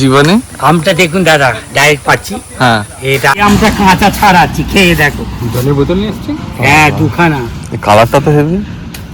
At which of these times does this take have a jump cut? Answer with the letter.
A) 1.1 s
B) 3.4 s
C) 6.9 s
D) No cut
B